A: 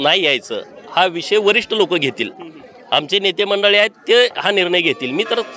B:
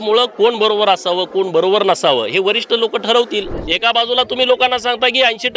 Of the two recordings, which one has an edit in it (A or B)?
B